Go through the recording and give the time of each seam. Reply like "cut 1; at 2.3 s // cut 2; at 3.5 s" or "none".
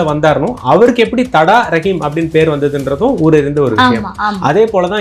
none